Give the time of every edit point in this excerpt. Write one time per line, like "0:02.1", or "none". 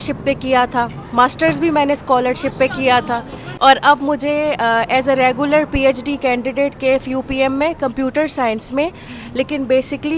0:03.4